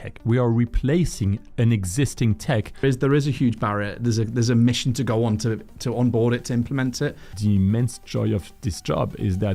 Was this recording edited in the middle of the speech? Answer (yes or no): yes